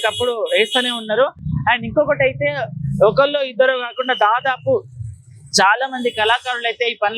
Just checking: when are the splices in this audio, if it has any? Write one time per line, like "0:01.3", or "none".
none